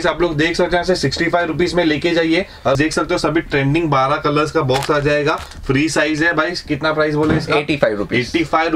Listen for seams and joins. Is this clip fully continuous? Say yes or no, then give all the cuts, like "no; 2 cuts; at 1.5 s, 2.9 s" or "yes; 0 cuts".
no; 1 cut; at 2.8 s